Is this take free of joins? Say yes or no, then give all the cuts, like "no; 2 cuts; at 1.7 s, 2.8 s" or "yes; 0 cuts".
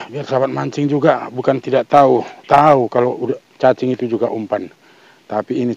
yes; 0 cuts